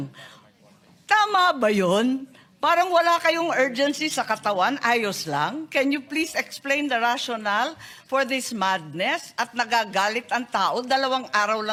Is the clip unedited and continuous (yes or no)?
yes